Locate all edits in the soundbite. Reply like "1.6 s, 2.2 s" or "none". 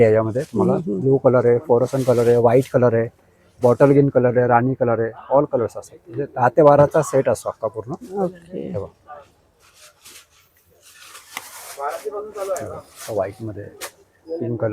none